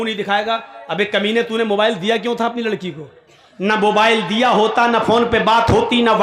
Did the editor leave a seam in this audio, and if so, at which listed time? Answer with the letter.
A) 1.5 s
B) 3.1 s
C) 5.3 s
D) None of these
D